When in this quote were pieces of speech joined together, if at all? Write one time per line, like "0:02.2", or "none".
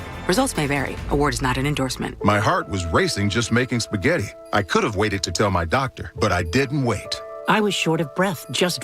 0:02.1